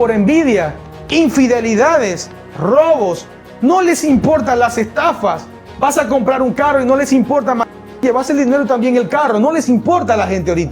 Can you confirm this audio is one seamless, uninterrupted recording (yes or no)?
yes